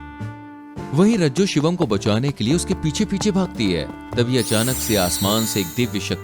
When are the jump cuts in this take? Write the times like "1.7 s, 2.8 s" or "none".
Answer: 0.9 s